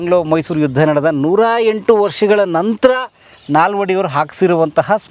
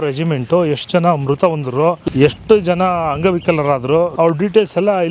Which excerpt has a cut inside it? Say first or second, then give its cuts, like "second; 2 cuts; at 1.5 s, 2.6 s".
second; 2 cuts; at 2.0 s, 4.1 s